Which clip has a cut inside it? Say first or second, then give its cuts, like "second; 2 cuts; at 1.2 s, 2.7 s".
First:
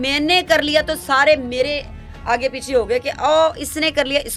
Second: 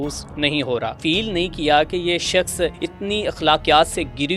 second; 2 cuts; at 0.9 s, 2.8 s